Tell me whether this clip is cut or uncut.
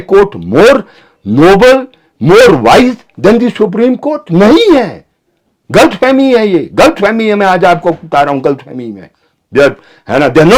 uncut